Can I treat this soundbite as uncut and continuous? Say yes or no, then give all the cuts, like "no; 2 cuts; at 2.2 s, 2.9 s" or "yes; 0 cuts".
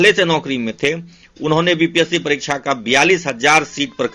yes; 0 cuts